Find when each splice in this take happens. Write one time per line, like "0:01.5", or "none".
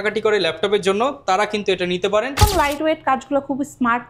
0:02.4